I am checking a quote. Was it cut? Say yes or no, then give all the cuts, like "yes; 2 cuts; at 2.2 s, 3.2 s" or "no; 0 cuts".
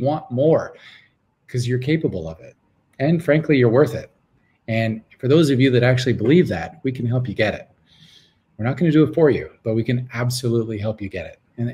no; 0 cuts